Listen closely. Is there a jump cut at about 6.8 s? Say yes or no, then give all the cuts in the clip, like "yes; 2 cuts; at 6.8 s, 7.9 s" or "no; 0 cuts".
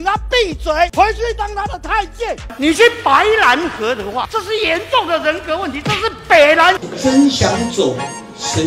yes; 3 cuts; at 0.9 s, 2.5 s, 6.8 s